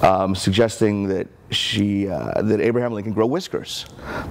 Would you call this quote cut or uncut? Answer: uncut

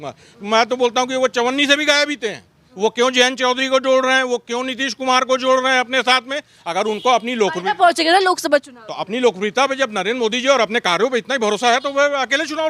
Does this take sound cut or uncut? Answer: cut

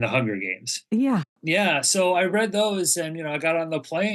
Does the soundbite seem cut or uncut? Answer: cut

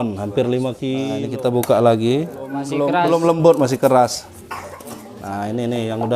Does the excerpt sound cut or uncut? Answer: cut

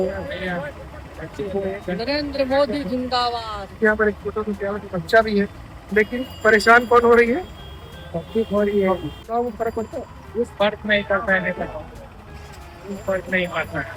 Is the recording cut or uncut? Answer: uncut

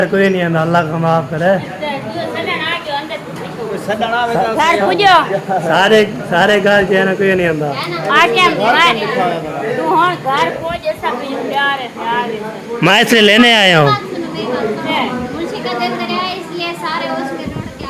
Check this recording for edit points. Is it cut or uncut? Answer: uncut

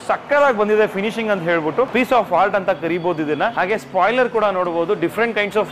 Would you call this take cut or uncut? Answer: cut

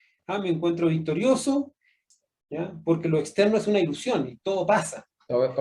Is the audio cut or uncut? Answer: cut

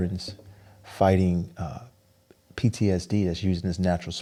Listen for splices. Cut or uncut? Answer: uncut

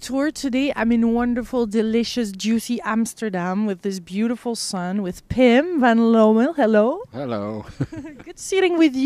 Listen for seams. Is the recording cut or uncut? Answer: uncut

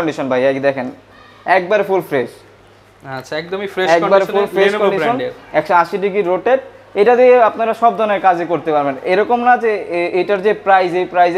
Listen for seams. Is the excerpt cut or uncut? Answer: uncut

